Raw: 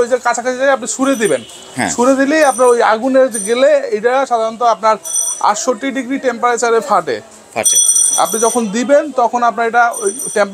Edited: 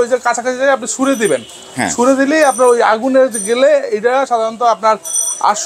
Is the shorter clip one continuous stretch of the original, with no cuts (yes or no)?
yes